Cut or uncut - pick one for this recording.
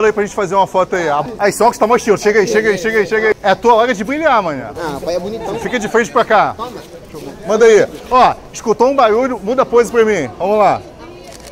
cut